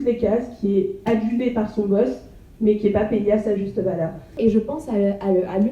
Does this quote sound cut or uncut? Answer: cut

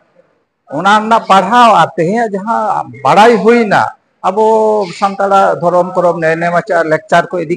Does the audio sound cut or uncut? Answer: uncut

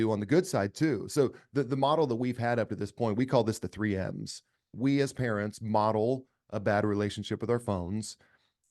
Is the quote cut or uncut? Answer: cut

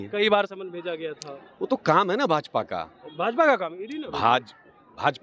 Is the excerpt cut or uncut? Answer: uncut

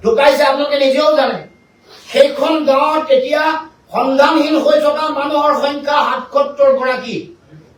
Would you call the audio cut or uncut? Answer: uncut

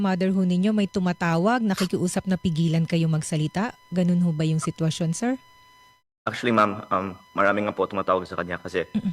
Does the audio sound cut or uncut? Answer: uncut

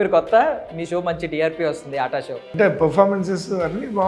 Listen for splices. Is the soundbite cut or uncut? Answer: cut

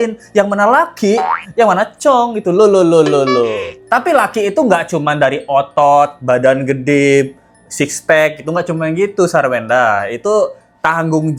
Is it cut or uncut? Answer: uncut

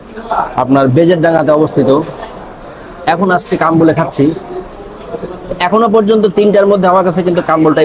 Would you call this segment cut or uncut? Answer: uncut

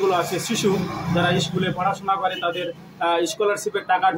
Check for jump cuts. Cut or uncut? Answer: uncut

